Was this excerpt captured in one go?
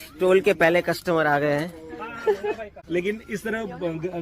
no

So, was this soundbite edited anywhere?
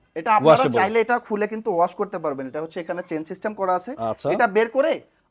no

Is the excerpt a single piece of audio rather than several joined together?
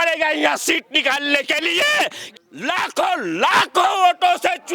no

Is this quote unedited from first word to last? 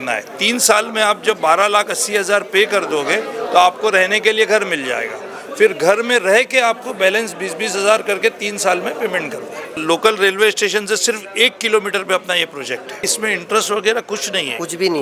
no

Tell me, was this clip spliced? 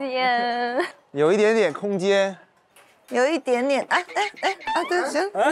no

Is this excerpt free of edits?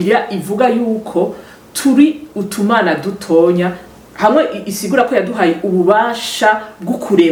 yes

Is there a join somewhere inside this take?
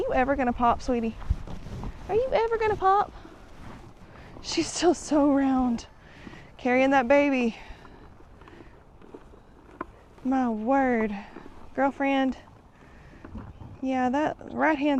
no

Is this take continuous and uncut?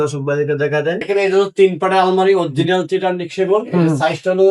no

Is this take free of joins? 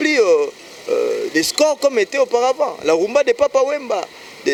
yes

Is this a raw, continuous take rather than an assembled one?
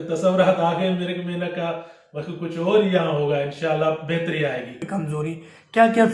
no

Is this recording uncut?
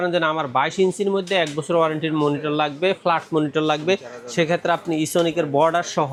yes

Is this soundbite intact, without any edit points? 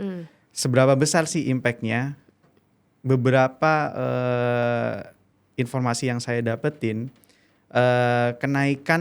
yes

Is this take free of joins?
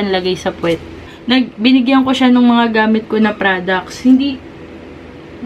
no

